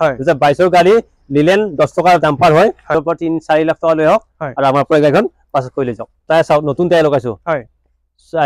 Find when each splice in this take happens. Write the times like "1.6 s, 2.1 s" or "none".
2.9 s, 6.2 s